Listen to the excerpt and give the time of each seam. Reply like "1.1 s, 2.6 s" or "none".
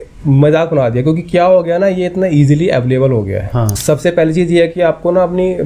3.8 s